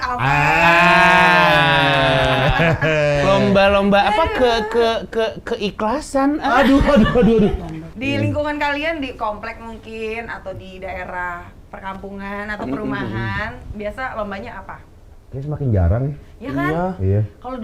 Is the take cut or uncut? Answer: uncut